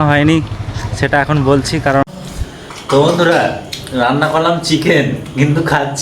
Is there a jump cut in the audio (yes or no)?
yes